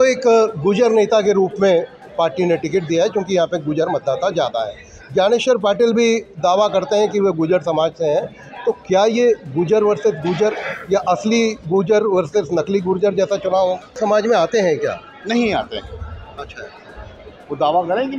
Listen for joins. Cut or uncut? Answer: cut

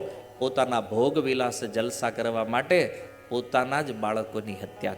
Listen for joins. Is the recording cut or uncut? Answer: uncut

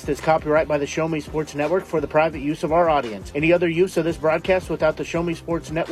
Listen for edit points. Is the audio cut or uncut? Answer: uncut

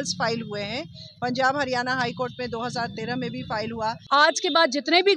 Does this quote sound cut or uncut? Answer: cut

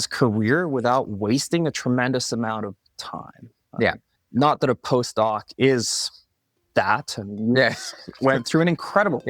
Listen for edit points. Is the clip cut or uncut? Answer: cut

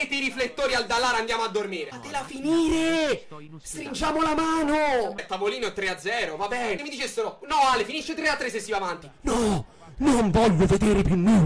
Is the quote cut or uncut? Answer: cut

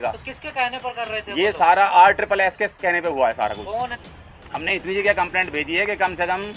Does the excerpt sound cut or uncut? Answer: cut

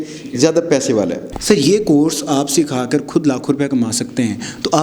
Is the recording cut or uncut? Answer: cut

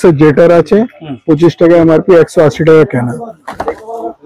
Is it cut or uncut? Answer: uncut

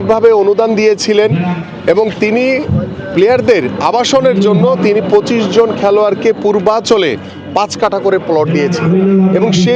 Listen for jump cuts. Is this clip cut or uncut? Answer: uncut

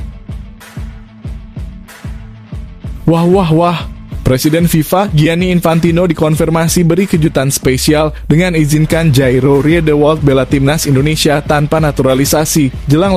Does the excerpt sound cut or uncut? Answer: uncut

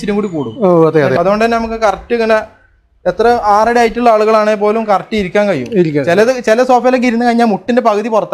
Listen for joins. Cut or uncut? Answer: cut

